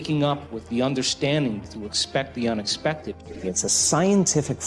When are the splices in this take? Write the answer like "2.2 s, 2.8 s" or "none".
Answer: 3.3 s